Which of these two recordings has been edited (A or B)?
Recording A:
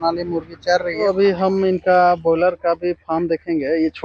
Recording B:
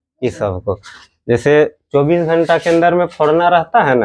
A